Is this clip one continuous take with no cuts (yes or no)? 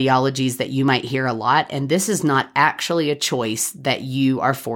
yes